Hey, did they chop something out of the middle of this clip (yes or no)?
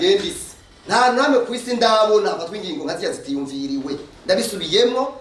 no